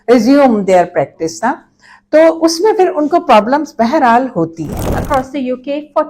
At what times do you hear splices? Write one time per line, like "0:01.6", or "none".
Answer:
0:05.0